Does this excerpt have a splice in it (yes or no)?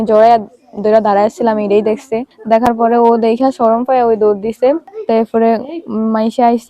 yes